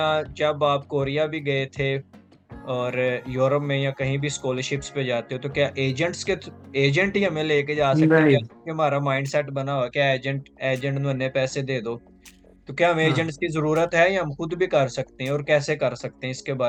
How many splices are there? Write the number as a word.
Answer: zero